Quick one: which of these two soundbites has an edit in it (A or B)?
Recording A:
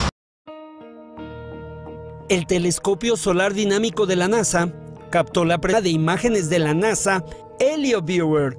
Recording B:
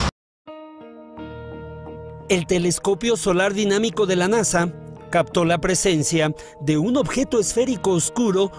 B